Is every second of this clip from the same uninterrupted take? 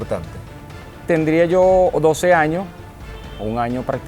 no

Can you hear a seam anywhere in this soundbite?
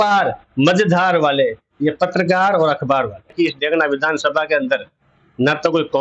yes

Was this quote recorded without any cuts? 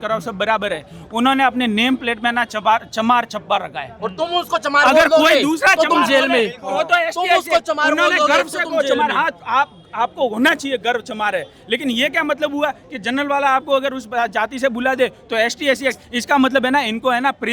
yes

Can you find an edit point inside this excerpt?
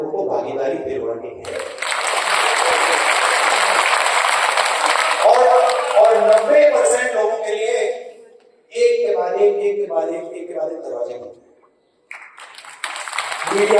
no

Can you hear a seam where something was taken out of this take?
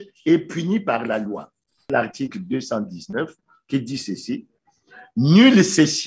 yes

